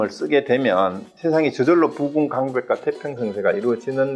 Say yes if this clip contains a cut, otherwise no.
no